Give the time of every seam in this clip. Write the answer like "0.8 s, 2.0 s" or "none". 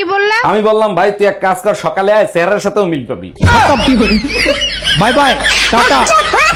none